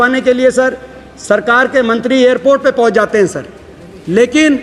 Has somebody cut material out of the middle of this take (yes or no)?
no